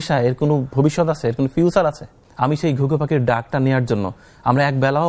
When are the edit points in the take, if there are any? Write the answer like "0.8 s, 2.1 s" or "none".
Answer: 2.2 s

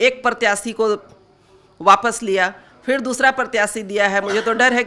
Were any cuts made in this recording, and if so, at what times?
none

